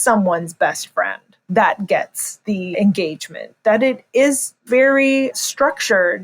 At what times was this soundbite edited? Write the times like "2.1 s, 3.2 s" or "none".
2.7 s, 4.6 s